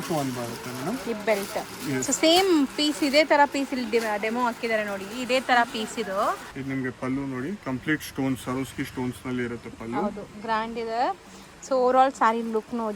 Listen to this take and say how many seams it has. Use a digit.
1